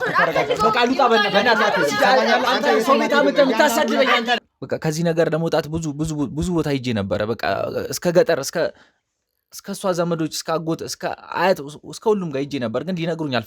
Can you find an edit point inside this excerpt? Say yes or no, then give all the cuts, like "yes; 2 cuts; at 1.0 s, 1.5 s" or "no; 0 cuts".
yes; 1 cut; at 4.5 s